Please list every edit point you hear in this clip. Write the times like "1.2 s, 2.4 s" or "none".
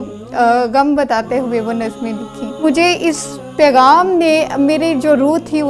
2.6 s

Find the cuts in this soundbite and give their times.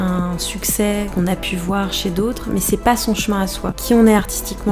1.1 s, 3.8 s

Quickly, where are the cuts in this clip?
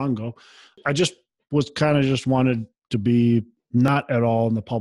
0.8 s, 3.9 s

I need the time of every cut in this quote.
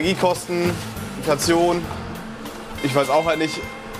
1.2 s

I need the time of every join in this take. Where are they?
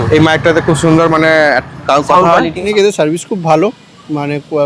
2.6 s

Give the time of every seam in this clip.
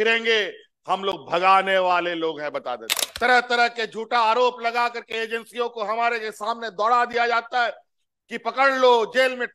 3.0 s

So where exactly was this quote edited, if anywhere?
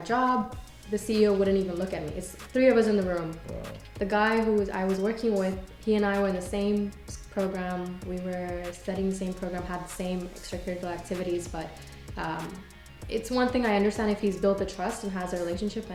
none

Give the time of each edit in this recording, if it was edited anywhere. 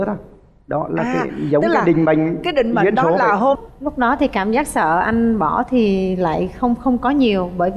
3.6 s

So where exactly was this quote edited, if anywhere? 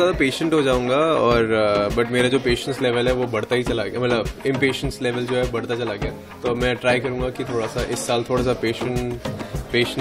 none

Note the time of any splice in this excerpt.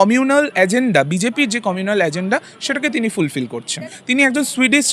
3.9 s

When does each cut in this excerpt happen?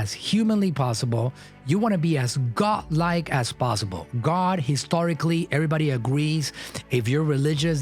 none

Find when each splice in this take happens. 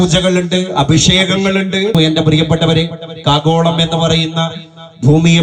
1.9 s

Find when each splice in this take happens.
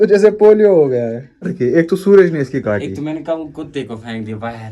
1.5 s

